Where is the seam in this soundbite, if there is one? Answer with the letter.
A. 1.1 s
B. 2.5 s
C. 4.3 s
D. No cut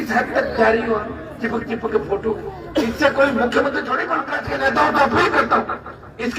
C